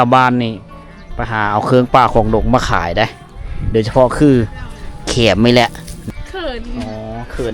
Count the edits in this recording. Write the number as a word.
one